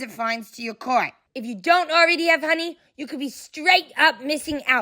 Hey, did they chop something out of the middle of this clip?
yes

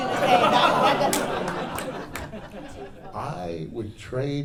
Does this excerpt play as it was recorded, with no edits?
yes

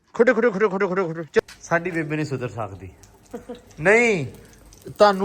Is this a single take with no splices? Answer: no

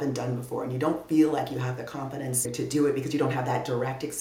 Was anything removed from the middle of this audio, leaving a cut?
yes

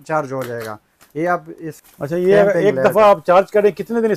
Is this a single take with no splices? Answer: no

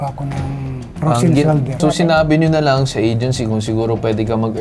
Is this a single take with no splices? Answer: no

